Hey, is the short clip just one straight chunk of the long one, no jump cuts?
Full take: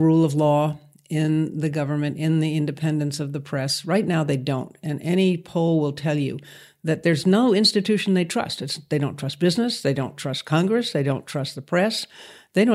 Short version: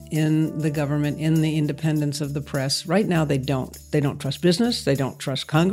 no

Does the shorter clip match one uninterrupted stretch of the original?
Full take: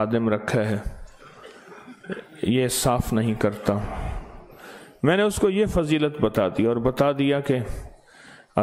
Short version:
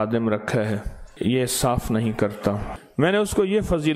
no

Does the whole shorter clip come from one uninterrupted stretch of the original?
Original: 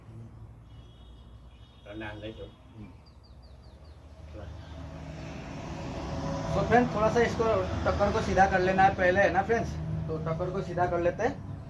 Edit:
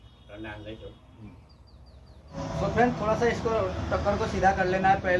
no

